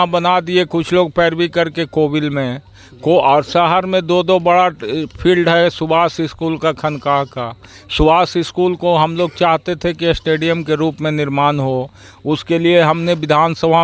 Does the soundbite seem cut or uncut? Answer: uncut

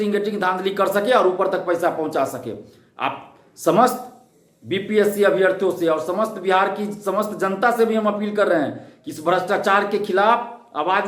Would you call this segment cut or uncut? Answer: uncut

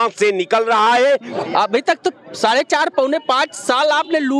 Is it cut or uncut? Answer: cut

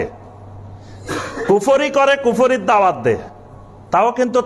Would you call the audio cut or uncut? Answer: uncut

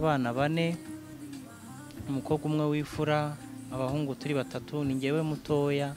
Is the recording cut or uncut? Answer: uncut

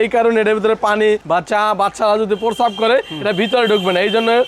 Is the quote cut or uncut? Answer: uncut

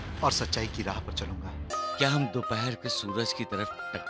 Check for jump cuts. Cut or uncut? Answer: cut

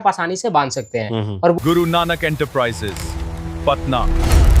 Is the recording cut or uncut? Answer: cut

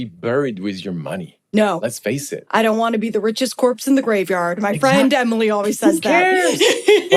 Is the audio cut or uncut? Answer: uncut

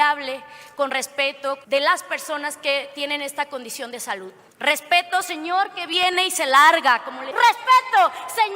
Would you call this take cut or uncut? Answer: cut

